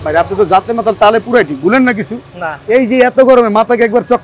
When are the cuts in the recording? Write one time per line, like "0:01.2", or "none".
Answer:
none